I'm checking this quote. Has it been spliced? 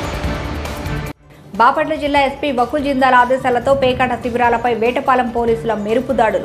yes; 1 cut; at 1.0 s

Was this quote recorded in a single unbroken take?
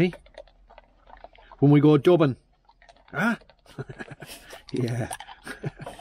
yes; 0 cuts

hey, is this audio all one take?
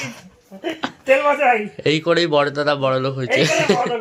yes; 0 cuts

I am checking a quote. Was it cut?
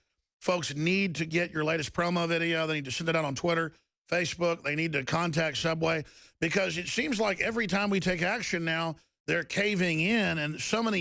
no; 0 cuts

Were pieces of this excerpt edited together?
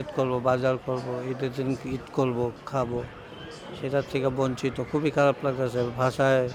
no; 0 cuts

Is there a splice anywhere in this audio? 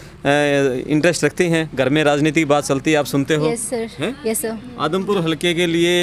no; 0 cuts

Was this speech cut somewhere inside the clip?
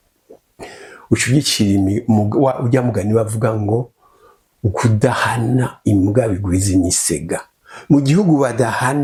no; 0 cuts

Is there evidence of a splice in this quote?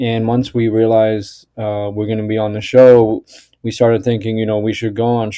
no; 0 cuts

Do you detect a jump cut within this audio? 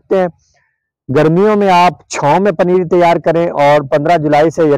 no; 0 cuts

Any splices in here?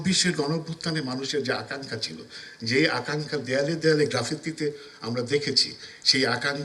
no; 0 cuts

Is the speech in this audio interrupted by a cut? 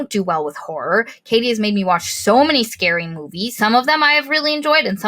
yes; 1 cut; at 3.5 s

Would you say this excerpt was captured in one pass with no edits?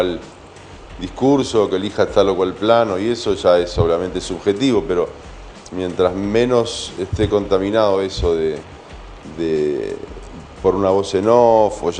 yes; 0 cuts

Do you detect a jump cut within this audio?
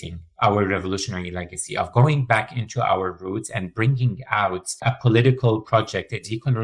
yes; 1 cut; at 4.8 s

